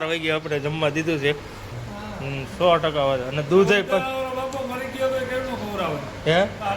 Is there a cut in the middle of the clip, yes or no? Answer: yes